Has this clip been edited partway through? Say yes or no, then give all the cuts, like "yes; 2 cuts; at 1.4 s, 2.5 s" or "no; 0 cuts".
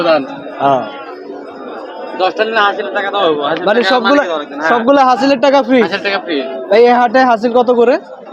no; 0 cuts